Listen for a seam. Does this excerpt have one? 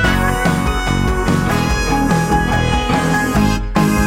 no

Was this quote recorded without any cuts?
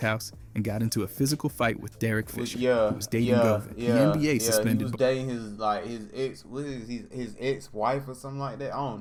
yes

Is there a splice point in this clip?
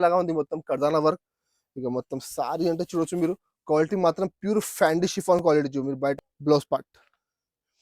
yes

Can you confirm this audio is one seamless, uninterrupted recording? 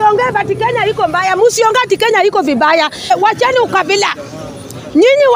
no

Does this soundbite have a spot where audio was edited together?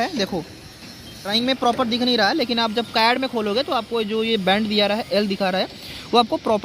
yes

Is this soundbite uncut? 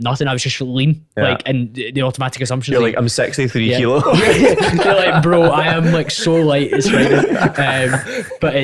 yes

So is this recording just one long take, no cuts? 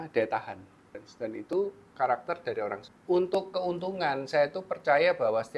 no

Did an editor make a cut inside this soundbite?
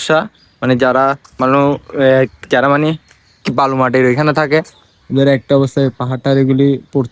no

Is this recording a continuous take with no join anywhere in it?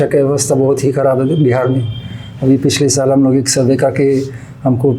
yes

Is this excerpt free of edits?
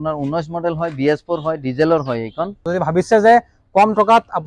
no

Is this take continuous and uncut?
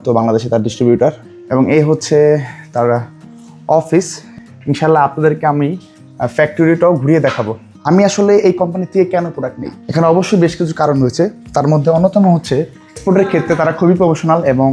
no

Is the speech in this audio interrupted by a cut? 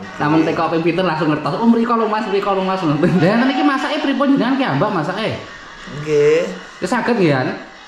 yes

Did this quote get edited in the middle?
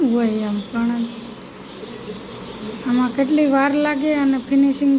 no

